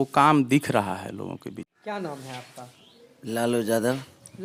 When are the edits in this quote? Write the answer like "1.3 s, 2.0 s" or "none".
1.7 s